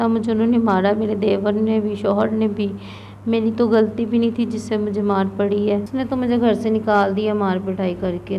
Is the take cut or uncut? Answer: cut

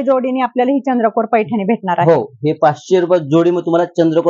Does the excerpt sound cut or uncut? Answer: uncut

